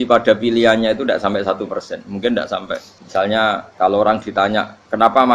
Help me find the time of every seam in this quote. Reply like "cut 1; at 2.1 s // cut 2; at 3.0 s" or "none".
cut 1; at 3.0 s // cut 2; at 3.7 s